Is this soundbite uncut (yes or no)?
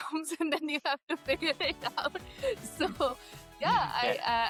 yes